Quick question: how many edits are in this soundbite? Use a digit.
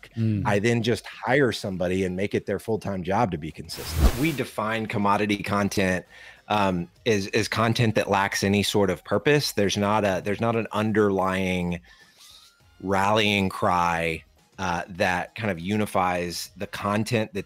1